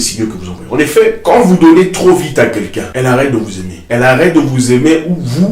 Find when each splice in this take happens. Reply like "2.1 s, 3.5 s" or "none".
1.2 s, 2.8 s, 3.7 s